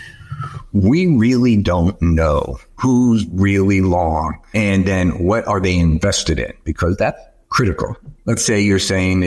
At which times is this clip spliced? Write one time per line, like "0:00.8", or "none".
0:08.1